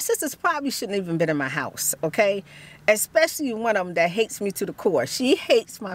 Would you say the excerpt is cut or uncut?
uncut